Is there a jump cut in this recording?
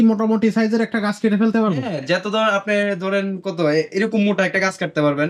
no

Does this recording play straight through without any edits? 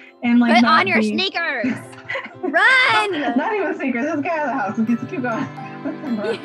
yes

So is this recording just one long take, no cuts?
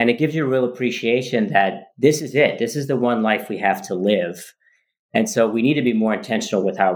yes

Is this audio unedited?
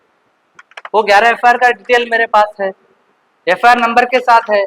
yes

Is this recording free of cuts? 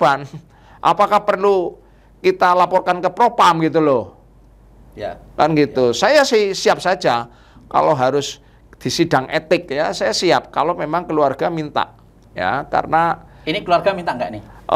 yes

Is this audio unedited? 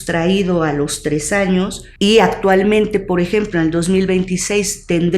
no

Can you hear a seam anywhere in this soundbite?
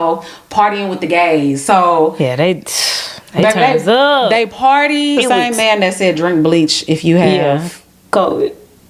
yes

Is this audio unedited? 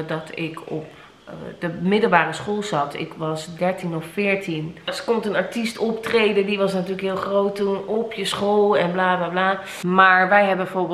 no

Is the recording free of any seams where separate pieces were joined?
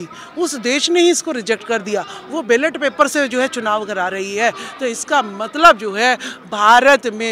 yes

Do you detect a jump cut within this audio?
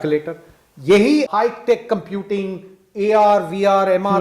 yes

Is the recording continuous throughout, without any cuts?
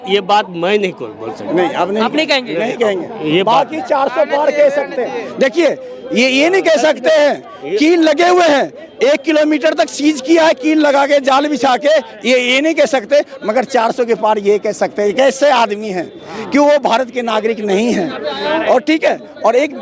yes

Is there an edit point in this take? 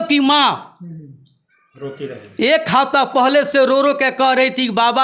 no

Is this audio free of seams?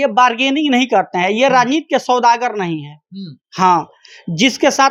yes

